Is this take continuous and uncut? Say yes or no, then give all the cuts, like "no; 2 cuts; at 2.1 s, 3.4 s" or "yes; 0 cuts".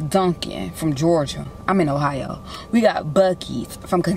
yes; 0 cuts